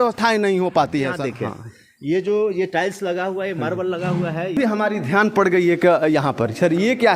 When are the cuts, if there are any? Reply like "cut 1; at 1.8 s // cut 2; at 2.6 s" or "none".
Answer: cut 1; at 1.2 s // cut 2; at 4.5 s